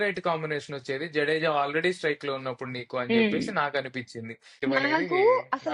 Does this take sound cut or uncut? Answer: cut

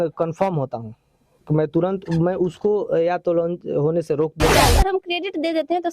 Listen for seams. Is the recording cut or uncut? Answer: cut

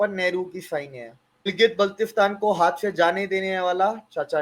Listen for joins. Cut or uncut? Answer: cut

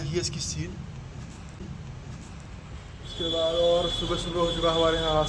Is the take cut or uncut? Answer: uncut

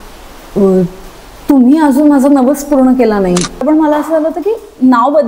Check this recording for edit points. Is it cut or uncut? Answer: cut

